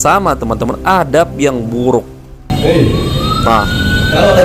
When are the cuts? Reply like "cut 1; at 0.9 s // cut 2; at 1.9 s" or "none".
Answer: cut 1; at 2.5 s